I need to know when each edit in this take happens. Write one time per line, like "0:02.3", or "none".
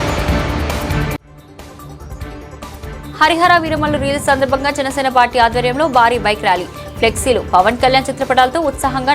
0:01.0